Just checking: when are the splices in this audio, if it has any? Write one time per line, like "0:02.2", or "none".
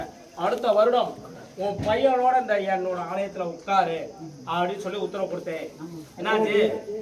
none